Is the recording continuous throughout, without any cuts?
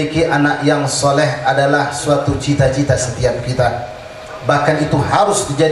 yes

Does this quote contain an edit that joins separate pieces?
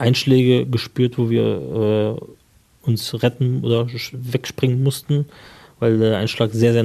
no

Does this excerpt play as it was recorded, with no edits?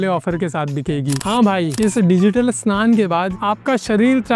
no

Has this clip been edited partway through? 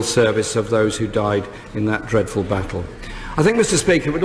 no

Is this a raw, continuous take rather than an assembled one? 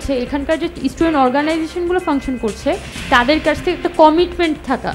yes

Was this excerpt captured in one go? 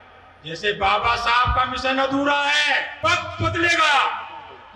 no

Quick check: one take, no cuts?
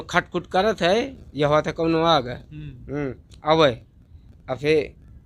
yes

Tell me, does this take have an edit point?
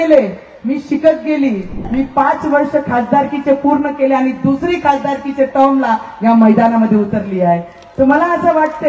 yes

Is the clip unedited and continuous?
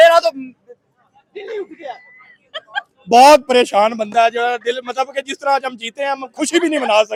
yes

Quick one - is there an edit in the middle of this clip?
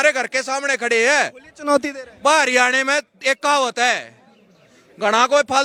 no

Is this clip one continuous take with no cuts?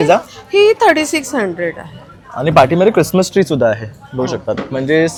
yes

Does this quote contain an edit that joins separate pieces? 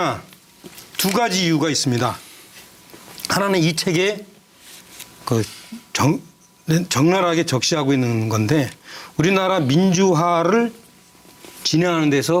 no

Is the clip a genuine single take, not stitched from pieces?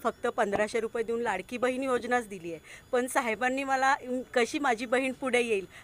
yes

